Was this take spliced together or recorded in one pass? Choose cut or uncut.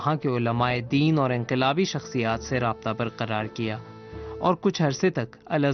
cut